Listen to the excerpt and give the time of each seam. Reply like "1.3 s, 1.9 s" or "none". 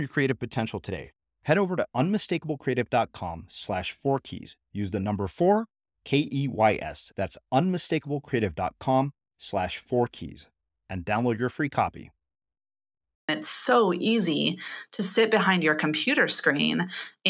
13.3 s